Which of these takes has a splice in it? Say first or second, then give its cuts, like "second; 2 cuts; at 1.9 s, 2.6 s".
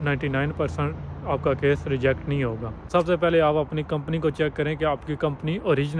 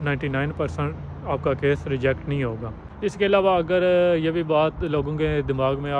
first; 1 cut; at 2.8 s